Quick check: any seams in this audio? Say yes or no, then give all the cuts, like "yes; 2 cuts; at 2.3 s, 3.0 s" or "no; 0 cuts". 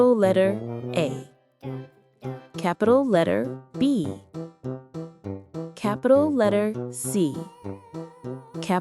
yes; 4 cuts; at 1.1 s, 2.6 s, 4.1 s, 5.7 s